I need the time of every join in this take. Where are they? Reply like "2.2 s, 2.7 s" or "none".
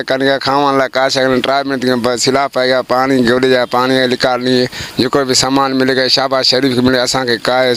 none